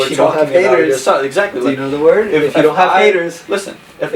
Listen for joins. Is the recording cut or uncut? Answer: uncut